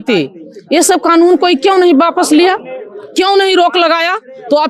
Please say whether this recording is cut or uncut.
uncut